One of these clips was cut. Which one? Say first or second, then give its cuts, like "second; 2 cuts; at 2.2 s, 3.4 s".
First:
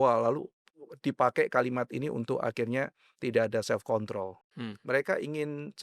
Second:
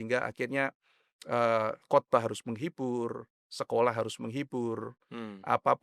first; 1 cut; at 4.4 s